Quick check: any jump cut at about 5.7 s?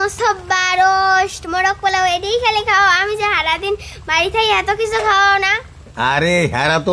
no; 0 cuts

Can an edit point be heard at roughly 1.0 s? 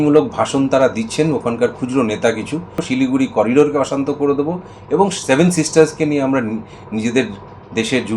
no; 1 cut; at 2.8 s

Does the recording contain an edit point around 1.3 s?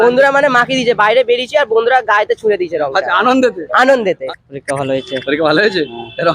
no; 1 cut; at 4.2 s

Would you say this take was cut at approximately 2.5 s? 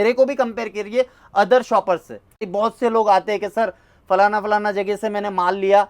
yes; 1 cut; at 2.5 s

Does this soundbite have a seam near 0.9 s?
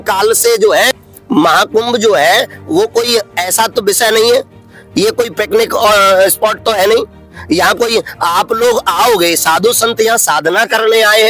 yes; 1 cut; at 0.9 s

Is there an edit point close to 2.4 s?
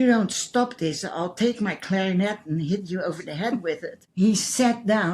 no; 1 cut; at 4.1 s

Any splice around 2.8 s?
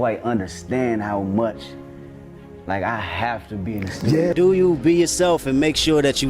no; 1 cut; at 4.3 s

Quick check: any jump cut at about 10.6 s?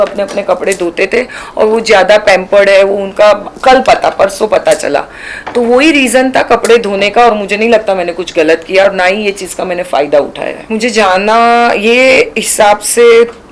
yes; 1 cut; at 10.6 s

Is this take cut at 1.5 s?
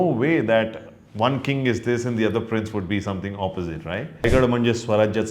no; 1 cut; at 4.2 s

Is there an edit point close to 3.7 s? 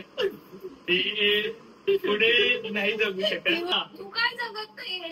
yes; 1 cut; at 3.7 s

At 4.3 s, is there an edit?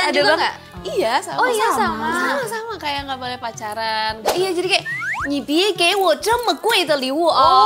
yes; 1 cut; at 4.3 s

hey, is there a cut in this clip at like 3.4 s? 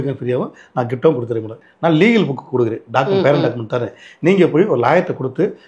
no; 1 cut; at 1.5 s

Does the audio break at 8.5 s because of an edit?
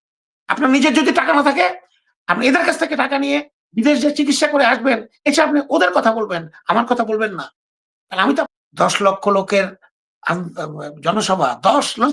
yes; 1 cut; at 8.5 s

